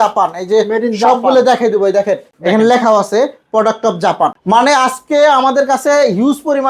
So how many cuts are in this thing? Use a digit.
2